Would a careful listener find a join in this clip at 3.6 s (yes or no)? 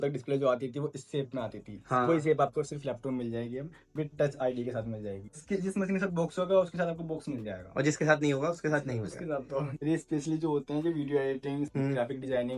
no